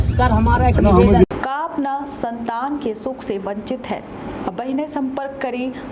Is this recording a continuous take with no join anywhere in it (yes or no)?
yes